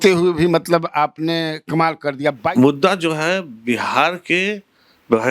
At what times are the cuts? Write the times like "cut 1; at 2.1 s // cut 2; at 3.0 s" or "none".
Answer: cut 1; at 2.5 s